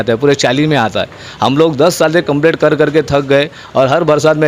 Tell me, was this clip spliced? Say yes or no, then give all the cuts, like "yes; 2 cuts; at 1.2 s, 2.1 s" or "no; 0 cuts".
no; 0 cuts